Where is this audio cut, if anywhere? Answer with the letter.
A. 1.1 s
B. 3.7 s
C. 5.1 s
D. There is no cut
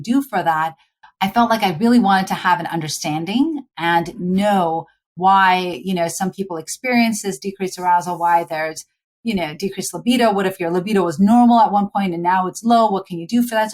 A